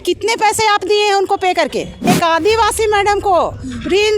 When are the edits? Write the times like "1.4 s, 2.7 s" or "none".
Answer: 2.0 s